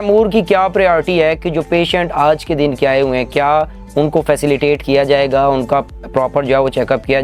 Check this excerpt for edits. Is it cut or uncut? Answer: uncut